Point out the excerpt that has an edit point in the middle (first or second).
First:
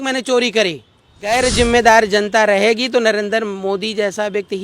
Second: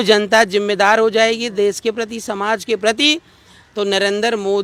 first